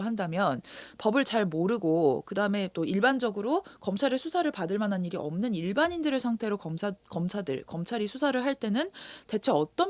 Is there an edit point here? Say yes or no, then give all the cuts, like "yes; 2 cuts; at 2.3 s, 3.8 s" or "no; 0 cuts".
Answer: no; 0 cuts